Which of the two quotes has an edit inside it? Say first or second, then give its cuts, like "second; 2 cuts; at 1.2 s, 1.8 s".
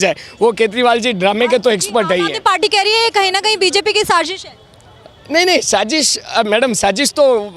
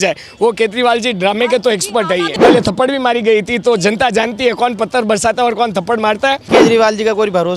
second; 2 cuts; at 2.4 s, 6.5 s